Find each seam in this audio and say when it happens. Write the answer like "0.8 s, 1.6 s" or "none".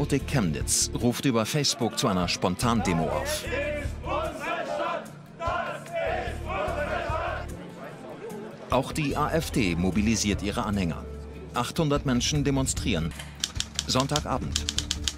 none